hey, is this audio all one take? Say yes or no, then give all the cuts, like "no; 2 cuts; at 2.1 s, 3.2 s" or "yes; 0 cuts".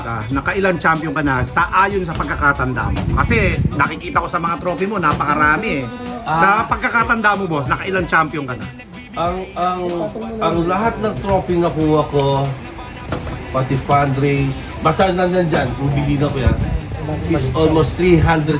yes; 0 cuts